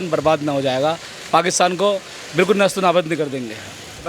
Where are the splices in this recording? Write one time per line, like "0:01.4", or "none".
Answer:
none